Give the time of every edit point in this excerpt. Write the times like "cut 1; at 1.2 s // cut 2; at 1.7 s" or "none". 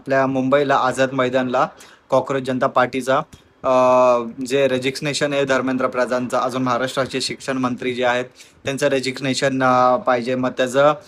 none